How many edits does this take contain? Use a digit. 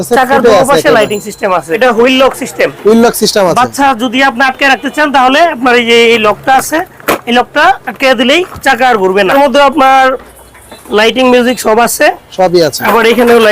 2